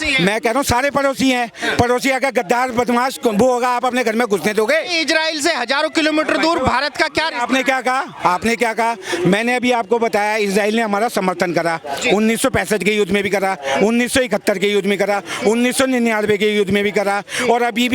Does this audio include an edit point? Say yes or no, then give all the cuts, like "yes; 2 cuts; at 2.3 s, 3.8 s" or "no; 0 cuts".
no; 0 cuts